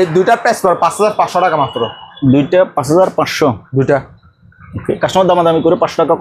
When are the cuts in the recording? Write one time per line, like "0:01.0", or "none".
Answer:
none